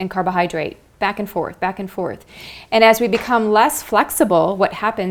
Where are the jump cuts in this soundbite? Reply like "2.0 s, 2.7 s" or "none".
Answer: none